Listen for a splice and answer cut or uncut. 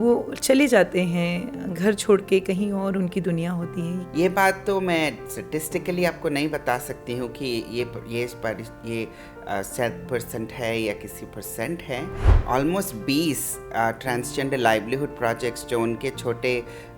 cut